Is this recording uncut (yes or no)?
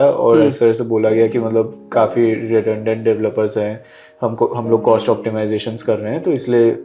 yes